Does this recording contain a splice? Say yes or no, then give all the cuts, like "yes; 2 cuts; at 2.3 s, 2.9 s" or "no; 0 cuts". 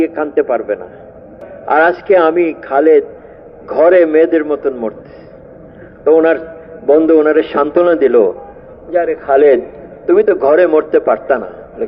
yes; 1 cut; at 1.5 s